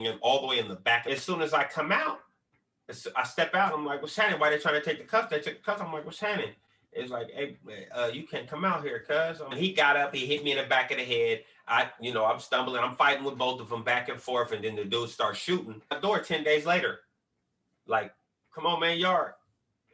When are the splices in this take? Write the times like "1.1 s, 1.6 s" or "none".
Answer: 1.0 s, 9.5 s, 16.0 s